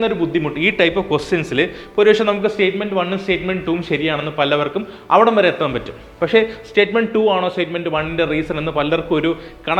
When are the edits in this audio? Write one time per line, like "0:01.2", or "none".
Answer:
none